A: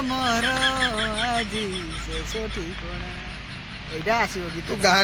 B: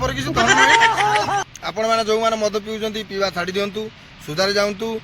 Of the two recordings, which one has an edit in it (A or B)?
B